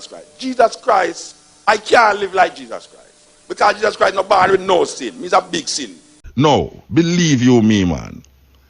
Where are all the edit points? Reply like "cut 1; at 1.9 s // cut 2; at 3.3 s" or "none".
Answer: cut 1; at 6.2 s